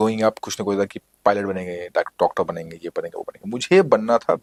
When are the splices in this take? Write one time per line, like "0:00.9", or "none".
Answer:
none